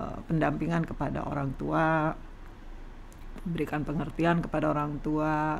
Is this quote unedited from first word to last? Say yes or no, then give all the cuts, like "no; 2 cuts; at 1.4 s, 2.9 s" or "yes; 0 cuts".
yes; 0 cuts